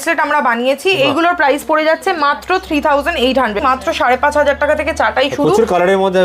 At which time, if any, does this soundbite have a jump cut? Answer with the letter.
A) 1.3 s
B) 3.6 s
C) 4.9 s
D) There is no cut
B